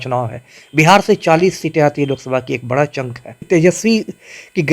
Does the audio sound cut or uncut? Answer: cut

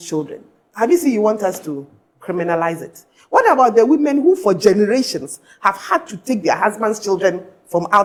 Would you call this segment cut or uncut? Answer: uncut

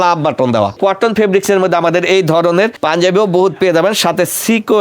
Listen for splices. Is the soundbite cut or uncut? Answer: cut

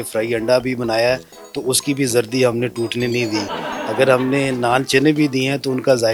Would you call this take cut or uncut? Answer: uncut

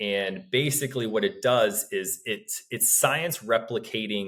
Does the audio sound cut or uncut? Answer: uncut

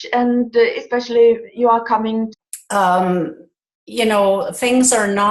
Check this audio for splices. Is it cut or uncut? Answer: uncut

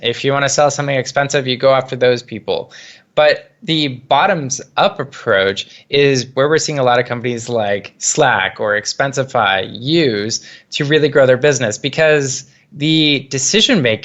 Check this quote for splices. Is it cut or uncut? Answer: uncut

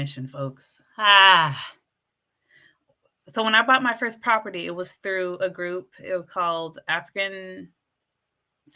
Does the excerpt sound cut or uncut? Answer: uncut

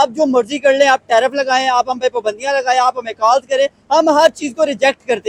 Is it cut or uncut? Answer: uncut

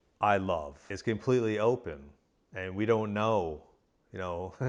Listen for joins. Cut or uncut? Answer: cut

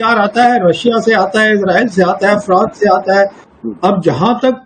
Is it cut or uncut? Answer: cut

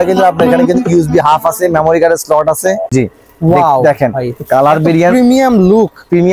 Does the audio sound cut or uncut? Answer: cut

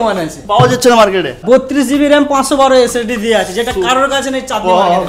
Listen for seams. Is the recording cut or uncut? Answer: cut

